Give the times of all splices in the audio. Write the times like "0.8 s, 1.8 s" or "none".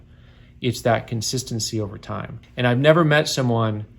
2.4 s